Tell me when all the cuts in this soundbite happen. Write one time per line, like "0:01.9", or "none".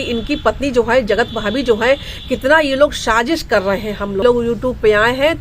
0:04.2